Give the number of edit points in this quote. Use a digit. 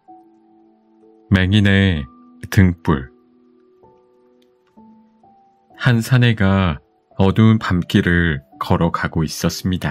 1